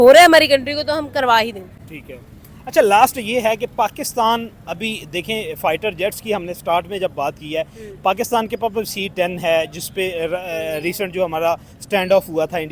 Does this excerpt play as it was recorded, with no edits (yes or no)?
yes